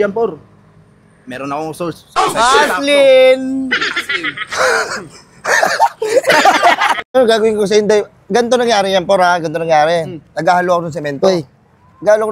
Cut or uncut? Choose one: cut